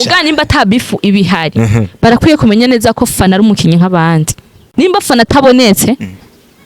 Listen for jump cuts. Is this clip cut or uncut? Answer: cut